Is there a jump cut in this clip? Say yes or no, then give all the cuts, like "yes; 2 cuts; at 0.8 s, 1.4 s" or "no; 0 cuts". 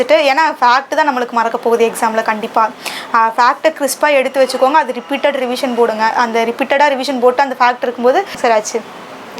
yes; 1 cut; at 8.4 s